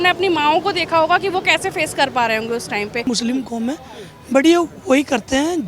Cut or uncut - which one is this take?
cut